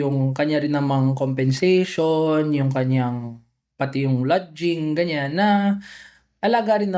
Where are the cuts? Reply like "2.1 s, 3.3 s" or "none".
none